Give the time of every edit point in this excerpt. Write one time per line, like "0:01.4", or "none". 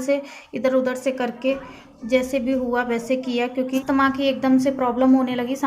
0:03.8

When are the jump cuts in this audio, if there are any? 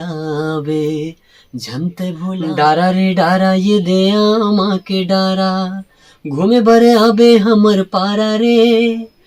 0:02.4

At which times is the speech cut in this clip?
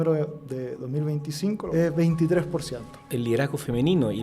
0:01.6
0:03.1

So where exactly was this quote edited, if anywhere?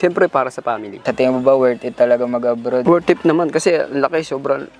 0:00.9
0:02.8

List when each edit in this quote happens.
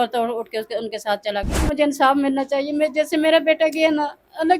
0:01.7

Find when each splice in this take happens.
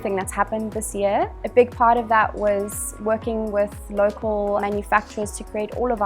0:01.4
0:04.6

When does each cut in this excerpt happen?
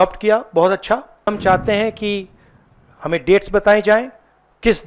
0:01.3

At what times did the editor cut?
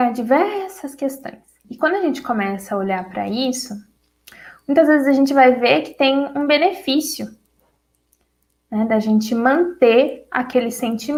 none

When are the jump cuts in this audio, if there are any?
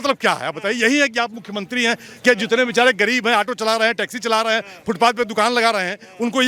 none

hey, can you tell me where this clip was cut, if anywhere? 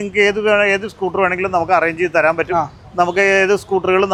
none

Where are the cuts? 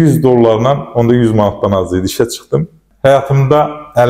0:02.8

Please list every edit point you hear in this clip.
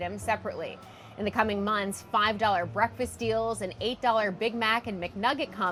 none

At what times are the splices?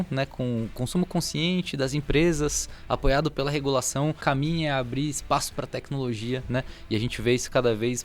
0:04.2

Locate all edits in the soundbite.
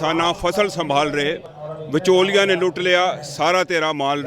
0:01.5

